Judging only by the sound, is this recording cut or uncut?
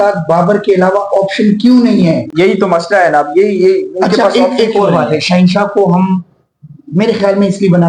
uncut